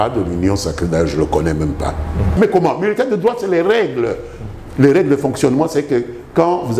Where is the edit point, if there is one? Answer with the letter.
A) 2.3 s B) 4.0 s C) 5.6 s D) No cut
A